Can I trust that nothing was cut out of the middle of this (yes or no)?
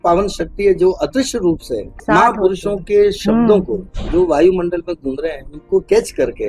no